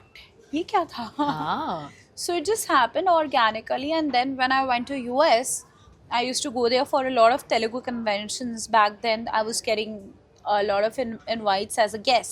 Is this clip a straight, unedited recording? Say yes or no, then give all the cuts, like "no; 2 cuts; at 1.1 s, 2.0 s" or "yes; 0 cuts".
yes; 0 cuts